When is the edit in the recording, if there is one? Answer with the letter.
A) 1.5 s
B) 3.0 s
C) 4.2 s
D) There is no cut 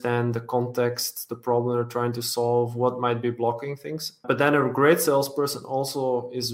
C